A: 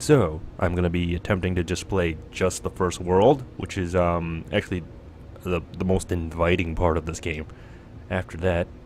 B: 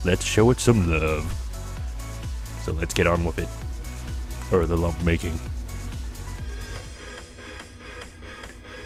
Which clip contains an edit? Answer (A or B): A